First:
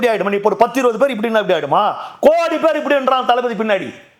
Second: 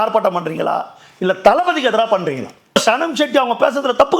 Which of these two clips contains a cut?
second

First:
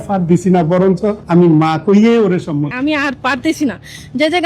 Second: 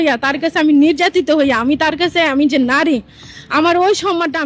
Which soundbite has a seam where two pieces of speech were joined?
first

